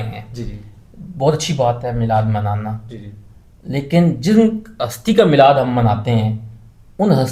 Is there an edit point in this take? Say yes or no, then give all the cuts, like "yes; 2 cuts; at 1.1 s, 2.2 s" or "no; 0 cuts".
no; 0 cuts